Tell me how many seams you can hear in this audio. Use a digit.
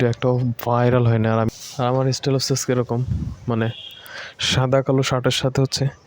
1